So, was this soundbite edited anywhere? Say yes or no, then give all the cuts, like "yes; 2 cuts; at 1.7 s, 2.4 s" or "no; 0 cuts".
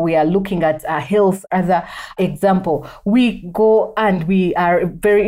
no; 0 cuts